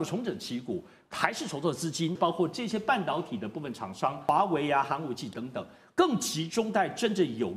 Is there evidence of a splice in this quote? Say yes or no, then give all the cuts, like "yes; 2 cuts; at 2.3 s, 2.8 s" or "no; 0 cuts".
yes; 3 cuts; at 1.0 s, 2.2 s, 4.2 s